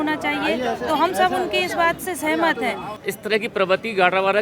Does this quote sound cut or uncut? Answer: cut